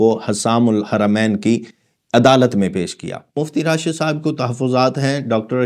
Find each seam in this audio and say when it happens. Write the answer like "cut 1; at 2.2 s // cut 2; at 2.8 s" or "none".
cut 1; at 3.4 s